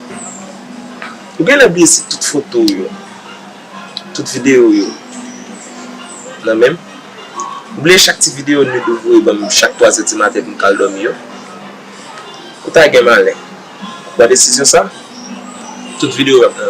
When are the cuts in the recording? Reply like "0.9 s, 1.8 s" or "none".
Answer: none